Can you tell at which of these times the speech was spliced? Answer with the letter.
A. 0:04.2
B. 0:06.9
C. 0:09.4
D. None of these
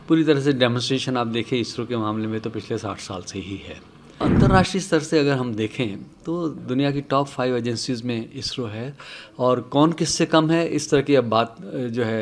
A